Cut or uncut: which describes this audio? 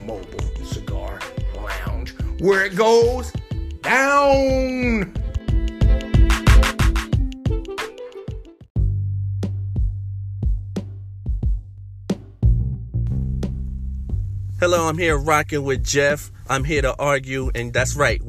cut